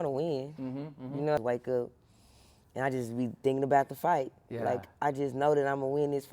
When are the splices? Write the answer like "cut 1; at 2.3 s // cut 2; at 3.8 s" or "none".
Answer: cut 1; at 1.4 s